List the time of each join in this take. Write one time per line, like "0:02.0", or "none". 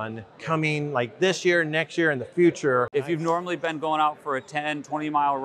0:02.9